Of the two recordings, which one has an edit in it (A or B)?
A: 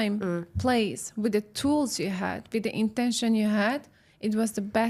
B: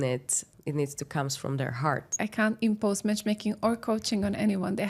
B